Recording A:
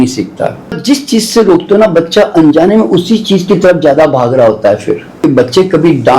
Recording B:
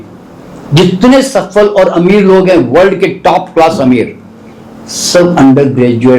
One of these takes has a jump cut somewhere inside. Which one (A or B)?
A